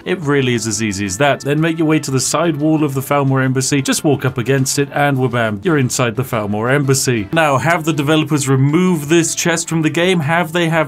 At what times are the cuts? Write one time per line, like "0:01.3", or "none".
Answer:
0:01.4
0:05.6
0:07.3